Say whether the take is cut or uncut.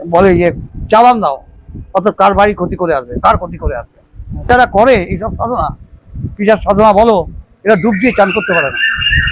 cut